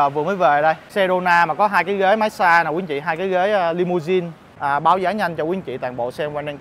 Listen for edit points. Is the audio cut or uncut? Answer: cut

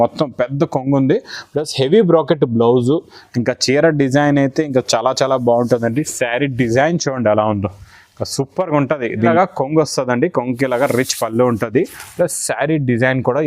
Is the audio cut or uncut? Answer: cut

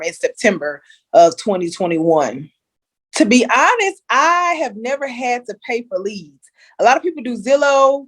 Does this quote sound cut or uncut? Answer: cut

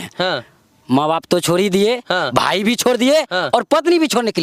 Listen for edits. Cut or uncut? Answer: uncut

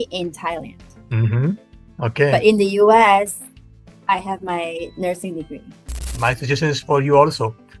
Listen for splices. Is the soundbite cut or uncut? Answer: cut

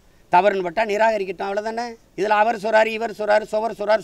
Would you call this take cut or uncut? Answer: cut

